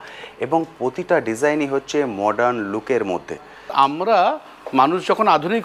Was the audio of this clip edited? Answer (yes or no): yes